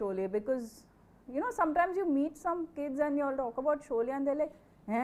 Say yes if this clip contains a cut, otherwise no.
no